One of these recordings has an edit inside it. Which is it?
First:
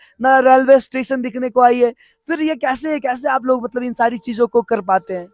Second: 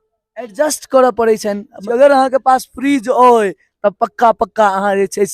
second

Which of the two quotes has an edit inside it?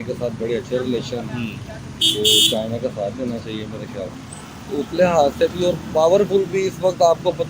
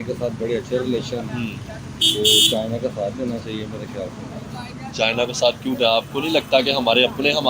first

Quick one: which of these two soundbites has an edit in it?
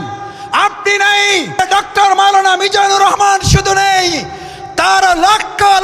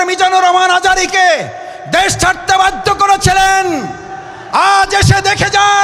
first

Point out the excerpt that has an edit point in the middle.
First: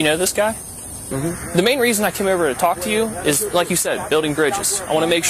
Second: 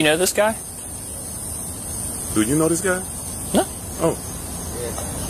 first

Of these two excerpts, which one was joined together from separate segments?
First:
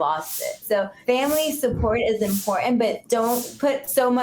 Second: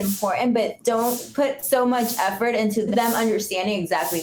first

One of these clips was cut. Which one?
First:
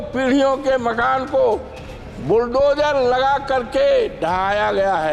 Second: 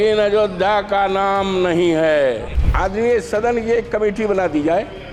second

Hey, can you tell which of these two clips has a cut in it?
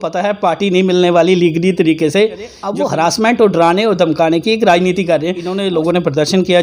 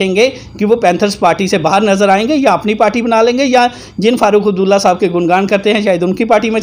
first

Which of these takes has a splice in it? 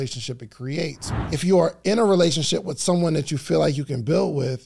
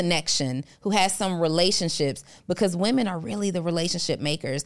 first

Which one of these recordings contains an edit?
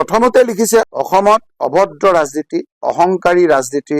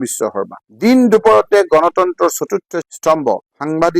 first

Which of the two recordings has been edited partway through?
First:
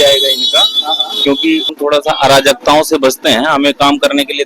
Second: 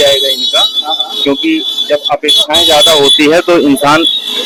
first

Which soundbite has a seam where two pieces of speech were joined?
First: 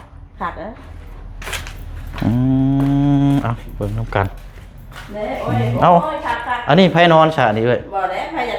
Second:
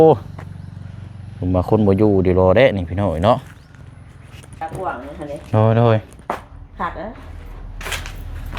second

